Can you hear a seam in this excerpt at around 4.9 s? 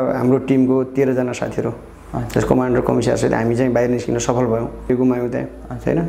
yes; 1 cut; at 4.9 s

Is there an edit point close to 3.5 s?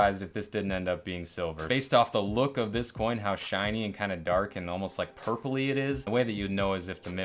no; 2 cuts; at 1.6 s, 6.0 s

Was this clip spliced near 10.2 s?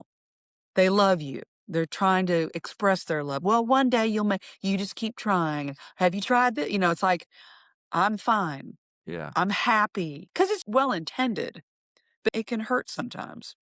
yes; 2 cuts; at 10.2 s, 12.3 s

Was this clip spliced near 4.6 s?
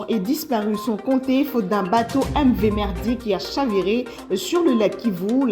yes; 1 cut; at 4.6 s

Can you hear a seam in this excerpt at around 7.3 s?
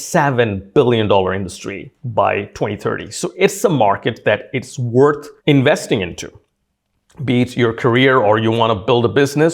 no; 0 cuts

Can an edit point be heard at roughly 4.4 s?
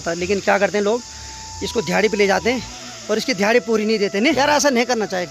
yes; 1 cut; at 4.4 s

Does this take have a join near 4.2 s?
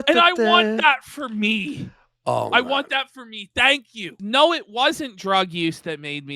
yes; 1 cut; at 4.2 s

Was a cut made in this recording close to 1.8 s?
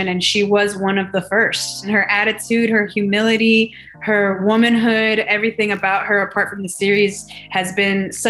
yes; 1 cut; at 1.8 s

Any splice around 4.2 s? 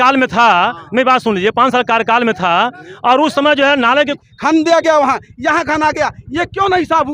yes; 1 cut; at 4.2 s

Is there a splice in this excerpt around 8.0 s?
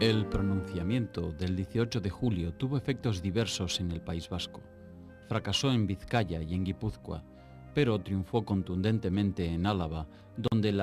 yes; 1 cut; at 8.0 s

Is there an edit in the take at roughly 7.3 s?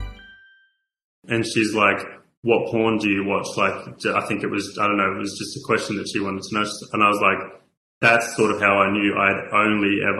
no; 1 cut; at 1.1 s

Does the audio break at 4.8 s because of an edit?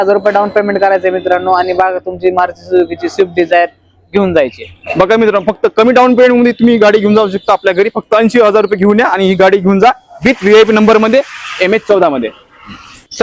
no; 0 cuts

